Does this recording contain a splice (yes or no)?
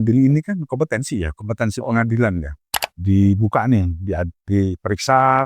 yes